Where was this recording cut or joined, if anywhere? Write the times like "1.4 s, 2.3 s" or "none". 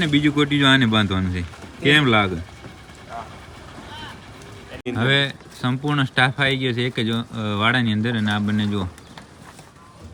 none